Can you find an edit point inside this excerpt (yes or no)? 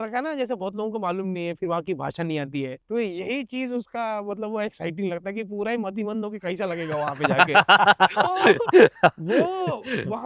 yes